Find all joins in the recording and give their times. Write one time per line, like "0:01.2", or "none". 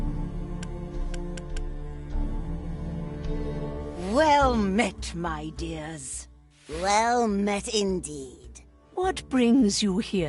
0:04.0